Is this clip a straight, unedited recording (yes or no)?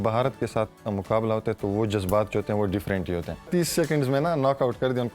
no